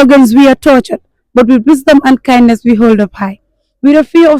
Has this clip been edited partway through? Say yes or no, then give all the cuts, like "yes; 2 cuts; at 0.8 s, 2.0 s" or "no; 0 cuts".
no; 0 cuts